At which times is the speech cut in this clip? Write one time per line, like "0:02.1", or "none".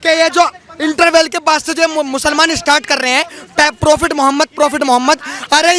none